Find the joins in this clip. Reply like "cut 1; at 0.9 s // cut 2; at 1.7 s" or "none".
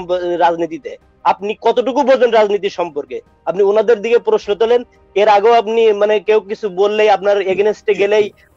none